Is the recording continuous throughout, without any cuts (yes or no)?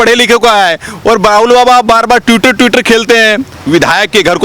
no